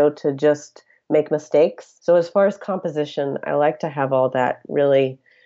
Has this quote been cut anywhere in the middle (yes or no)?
yes